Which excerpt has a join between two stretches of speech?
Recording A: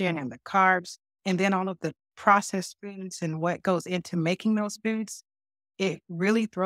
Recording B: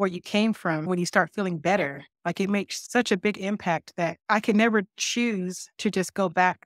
B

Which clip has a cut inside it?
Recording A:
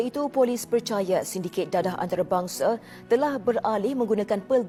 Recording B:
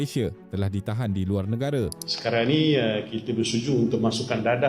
B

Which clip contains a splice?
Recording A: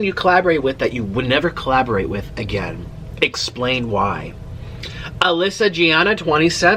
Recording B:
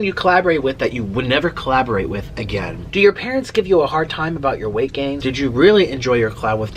B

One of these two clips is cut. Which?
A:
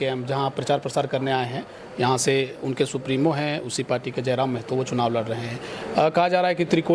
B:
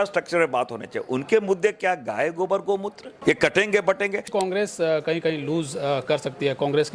B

